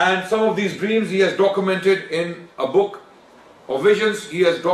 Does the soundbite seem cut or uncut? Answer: uncut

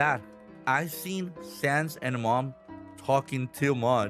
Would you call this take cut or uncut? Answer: uncut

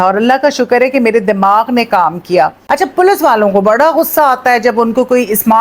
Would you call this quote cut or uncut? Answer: cut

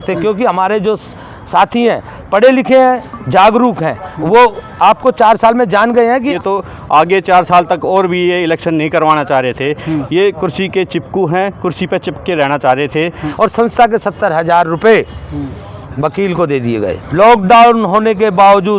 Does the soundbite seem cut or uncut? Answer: cut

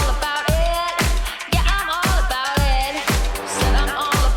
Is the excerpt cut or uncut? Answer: uncut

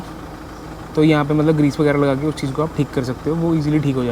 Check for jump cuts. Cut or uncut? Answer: uncut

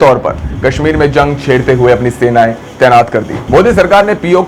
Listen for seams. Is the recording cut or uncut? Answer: cut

